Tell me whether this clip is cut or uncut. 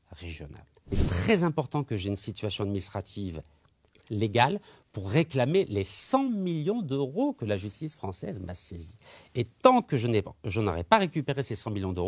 cut